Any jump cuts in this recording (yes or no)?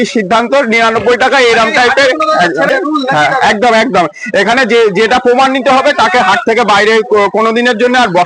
yes